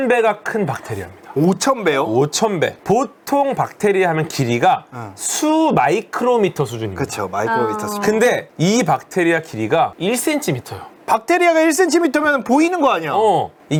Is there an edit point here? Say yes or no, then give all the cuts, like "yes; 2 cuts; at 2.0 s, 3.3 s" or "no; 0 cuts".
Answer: no; 0 cuts